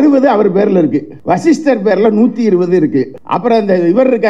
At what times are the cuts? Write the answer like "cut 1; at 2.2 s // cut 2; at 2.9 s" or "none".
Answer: cut 1; at 1.1 s // cut 2; at 3.2 s